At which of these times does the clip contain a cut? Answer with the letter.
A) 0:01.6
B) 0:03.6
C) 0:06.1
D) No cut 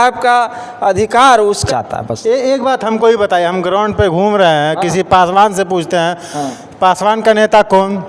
A